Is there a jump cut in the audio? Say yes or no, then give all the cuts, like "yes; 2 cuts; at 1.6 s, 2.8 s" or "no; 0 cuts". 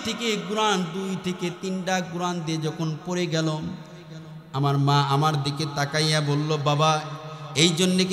no; 0 cuts